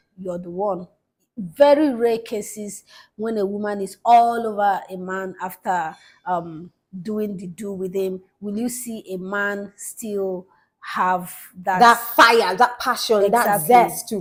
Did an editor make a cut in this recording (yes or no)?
no